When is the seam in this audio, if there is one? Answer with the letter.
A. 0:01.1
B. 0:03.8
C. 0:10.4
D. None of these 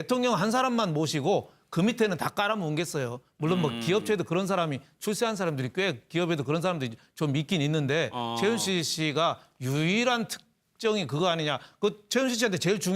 B